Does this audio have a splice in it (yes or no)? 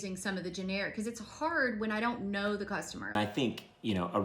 yes